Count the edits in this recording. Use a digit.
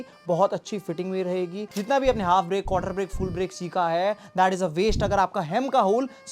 1